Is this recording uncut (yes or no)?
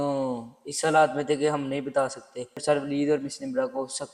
no